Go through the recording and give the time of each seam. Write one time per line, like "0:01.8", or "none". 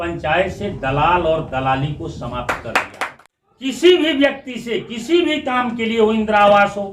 0:03.2